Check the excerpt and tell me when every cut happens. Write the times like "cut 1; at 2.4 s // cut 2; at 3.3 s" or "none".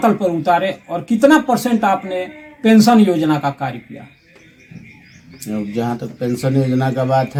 none